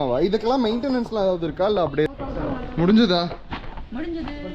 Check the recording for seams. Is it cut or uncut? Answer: cut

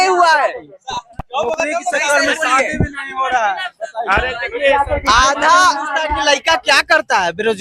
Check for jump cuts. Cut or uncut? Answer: uncut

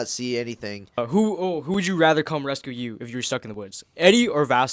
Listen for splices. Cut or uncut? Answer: cut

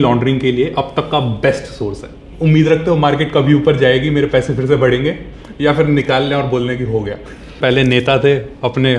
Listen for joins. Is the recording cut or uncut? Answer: cut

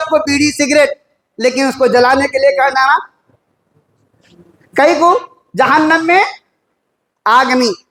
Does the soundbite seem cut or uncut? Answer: uncut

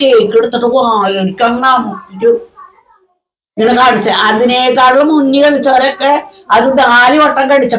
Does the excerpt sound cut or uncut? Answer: uncut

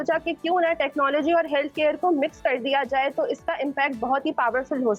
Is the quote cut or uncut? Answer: uncut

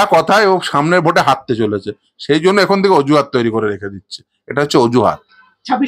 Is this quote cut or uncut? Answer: uncut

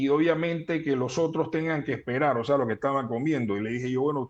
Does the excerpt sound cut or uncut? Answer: uncut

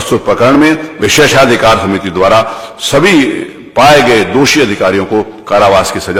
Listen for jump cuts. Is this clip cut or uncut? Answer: uncut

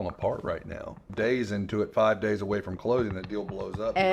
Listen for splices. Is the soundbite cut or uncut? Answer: cut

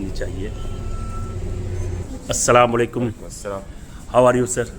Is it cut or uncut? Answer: cut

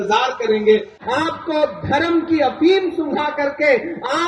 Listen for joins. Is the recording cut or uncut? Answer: cut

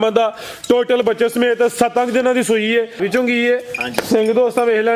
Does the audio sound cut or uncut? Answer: cut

